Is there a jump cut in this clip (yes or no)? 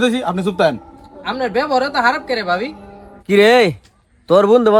no